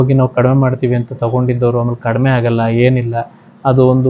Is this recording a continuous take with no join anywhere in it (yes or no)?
yes